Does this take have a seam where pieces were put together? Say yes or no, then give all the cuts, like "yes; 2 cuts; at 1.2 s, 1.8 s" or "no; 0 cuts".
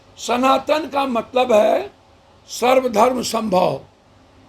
no; 0 cuts